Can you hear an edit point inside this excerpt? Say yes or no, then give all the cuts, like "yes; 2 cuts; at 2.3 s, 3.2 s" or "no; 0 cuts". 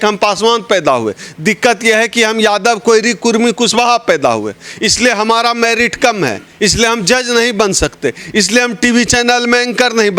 no; 0 cuts